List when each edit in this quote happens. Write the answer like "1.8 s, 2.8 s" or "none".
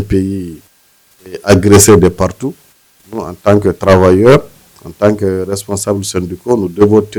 none